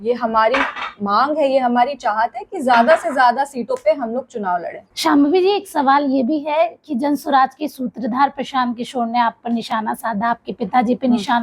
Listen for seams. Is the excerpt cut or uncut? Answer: uncut